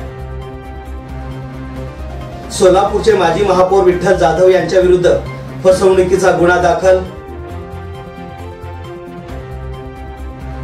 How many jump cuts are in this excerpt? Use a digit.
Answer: 1